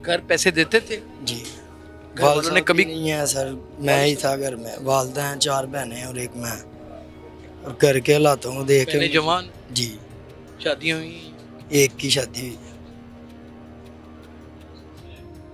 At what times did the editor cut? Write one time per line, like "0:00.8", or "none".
none